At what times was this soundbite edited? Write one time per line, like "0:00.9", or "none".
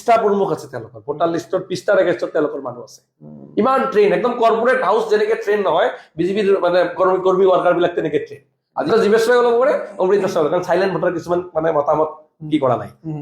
0:08.9